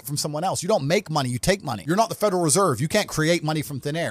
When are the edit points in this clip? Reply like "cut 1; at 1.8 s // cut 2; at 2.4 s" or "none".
cut 1; at 1.7 s